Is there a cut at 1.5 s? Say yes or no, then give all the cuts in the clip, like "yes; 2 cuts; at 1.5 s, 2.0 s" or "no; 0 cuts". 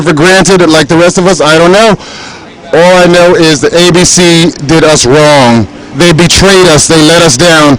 yes; 1 cut; at 1.5 s